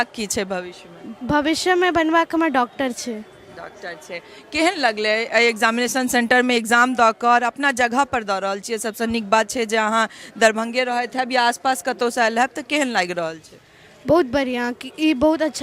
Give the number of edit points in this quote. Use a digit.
0